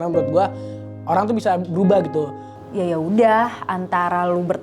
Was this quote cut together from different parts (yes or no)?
yes